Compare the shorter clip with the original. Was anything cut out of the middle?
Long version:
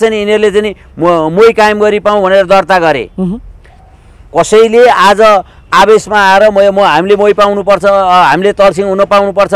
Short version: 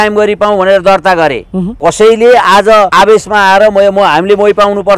yes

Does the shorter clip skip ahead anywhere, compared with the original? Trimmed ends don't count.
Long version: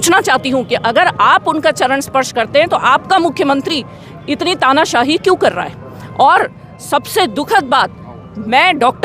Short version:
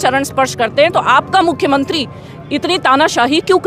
no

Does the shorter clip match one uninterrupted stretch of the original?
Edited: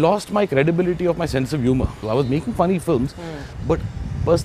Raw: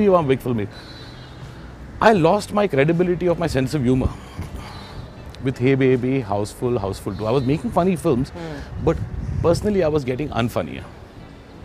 no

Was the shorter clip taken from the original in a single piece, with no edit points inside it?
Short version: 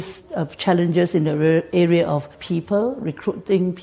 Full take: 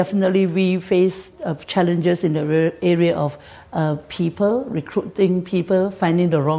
no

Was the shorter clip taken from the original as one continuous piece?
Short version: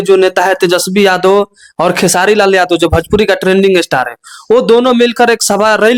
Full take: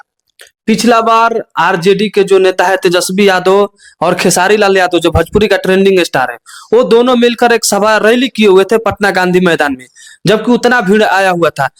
yes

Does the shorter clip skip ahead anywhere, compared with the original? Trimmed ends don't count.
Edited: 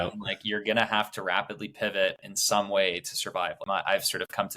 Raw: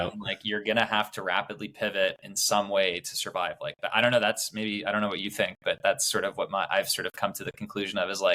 yes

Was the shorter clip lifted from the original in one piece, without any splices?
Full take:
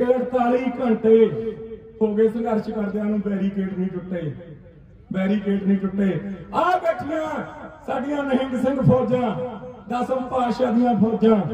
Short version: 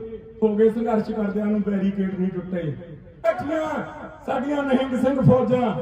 no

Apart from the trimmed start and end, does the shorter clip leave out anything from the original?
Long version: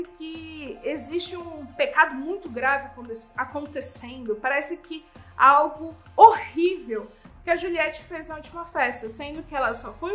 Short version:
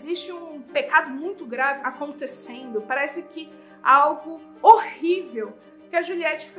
yes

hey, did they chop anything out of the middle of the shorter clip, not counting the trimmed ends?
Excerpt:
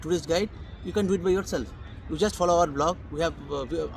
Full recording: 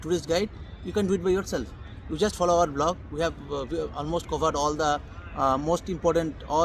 no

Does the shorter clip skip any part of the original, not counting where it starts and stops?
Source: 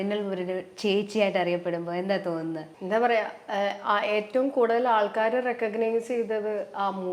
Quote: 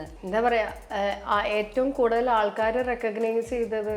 no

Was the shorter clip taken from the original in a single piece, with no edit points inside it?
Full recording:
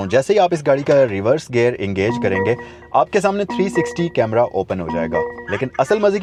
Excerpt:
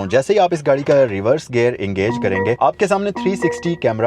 no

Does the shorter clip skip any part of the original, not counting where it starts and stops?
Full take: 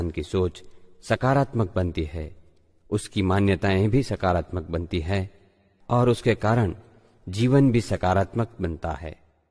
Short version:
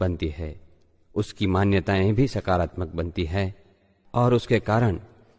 no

